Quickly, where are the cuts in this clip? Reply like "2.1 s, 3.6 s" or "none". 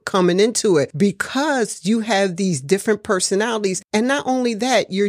0.9 s, 3.8 s